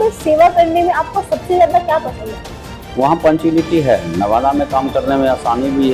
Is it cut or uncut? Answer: cut